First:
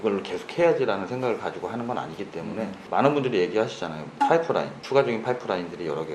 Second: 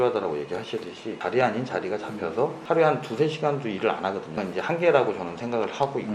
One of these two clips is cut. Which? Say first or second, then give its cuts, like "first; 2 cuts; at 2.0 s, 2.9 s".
second; 2 cuts; at 1.1 s, 4.4 s